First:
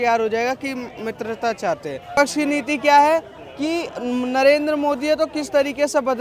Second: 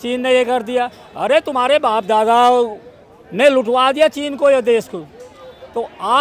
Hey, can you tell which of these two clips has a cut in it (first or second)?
first